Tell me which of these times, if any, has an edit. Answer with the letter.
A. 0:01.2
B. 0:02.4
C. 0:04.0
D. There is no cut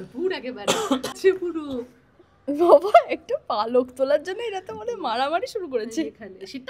A